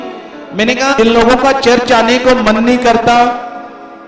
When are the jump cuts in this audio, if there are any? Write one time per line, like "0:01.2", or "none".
0:01.0